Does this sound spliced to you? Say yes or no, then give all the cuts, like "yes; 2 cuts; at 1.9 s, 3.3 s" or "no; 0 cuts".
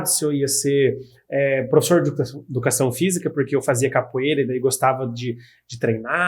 no; 0 cuts